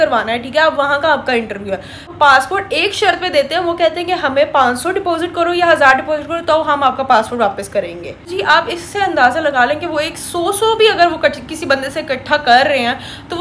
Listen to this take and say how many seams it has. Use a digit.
2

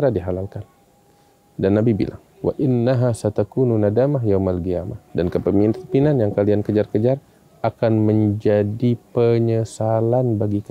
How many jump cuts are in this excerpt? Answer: 2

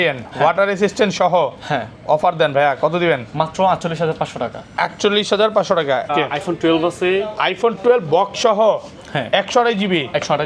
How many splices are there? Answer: 1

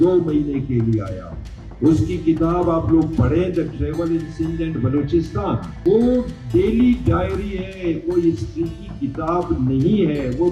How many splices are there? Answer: 1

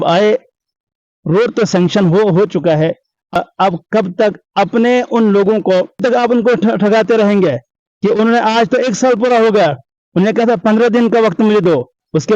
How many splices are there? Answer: 2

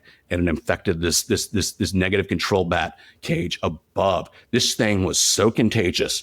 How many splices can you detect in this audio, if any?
0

